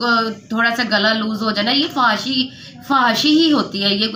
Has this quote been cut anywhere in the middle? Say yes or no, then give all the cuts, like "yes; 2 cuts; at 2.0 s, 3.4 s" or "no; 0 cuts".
no; 0 cuts